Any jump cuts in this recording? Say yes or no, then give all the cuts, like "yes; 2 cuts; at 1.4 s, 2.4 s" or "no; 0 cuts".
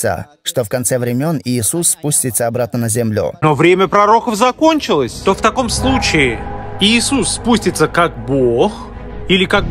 yes; 2 cuts; at 3.4 s, 5.1 s